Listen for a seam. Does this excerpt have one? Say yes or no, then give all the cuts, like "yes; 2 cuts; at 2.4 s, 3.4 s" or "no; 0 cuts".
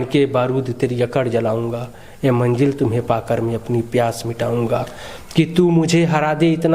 no; 0 cuts